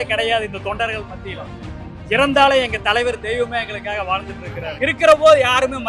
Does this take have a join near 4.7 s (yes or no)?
yes